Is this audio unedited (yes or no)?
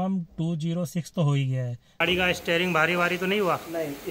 no